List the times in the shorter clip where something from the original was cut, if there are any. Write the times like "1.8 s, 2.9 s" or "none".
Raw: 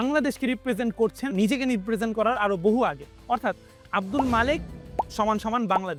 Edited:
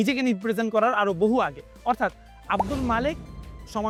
none